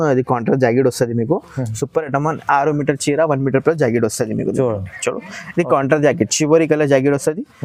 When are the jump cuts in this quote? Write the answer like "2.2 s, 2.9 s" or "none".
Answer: none